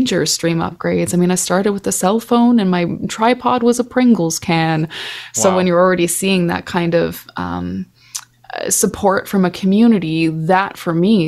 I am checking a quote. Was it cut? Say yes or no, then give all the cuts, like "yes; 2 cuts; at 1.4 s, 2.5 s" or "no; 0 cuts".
no; 0 cuts